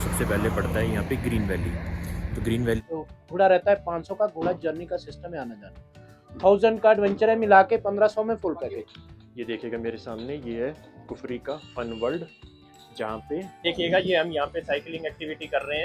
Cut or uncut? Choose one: cut